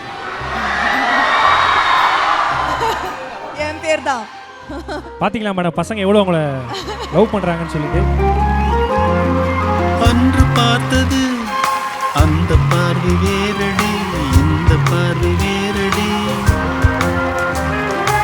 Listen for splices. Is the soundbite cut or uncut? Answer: uncut